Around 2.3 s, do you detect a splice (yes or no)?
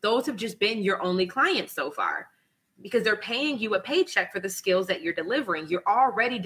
no